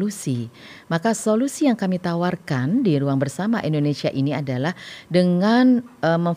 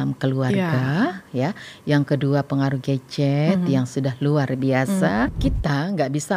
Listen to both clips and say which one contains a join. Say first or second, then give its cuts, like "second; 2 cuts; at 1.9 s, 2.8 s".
second; 1 cut; at 5.3 s